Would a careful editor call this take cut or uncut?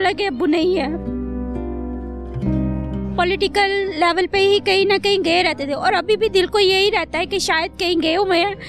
cut